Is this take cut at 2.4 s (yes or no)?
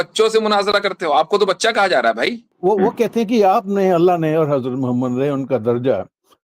yes